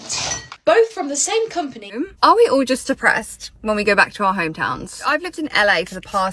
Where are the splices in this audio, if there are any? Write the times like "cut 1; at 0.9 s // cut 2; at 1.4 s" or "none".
cut 1; at 1.9 s // cut 2; at 5.1 s